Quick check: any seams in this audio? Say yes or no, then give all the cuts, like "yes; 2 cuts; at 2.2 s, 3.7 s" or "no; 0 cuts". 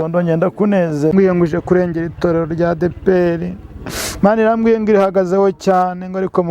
yes; 1 cut; at 1.1 s